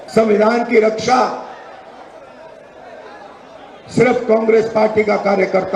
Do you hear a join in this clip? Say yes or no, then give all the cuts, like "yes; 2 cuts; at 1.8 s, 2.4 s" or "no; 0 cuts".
no; 0 cuts